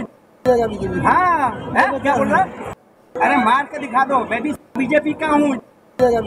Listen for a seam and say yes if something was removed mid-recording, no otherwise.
no